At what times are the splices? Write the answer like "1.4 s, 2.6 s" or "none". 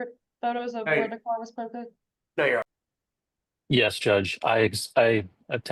2.6 s